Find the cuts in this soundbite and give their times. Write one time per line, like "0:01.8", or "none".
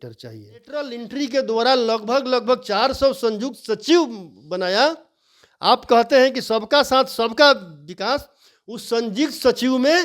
0:01.0